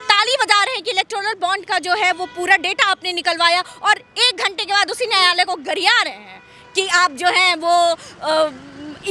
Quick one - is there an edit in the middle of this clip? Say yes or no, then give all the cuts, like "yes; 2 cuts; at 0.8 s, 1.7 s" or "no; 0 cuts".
no; 0 cuts